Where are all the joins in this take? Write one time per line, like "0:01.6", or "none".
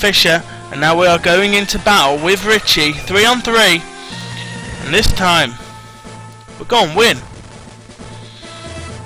0:07.1